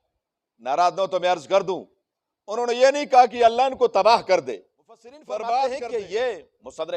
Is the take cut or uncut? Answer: cut